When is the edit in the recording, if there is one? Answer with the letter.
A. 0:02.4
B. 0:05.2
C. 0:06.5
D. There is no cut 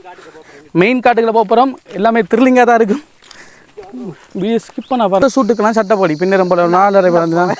B